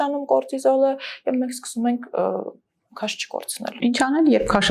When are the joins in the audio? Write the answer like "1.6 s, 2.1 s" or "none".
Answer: none